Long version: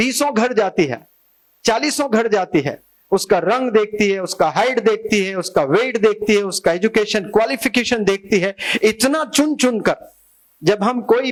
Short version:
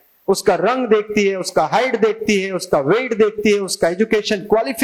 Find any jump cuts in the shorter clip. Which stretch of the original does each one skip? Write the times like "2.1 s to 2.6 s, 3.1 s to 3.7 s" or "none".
none